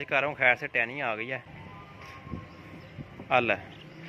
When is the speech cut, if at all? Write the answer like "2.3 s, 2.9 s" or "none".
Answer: 1.5 s